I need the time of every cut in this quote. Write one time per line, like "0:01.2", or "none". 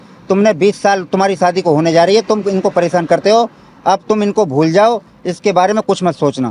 none